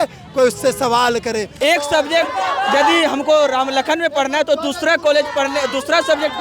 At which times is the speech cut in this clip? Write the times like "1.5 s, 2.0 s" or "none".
1.5 s